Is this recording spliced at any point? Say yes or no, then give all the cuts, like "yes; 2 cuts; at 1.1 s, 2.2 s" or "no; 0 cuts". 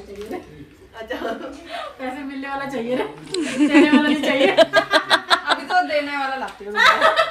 no; 0 cuts